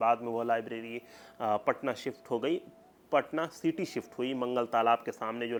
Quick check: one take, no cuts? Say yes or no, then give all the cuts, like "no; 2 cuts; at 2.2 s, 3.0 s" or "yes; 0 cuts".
yes; 0 cuts